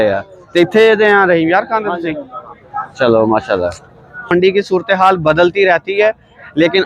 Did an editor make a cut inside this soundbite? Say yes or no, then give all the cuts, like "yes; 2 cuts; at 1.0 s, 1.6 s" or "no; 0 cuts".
yes; 1 cut; at 4.3 s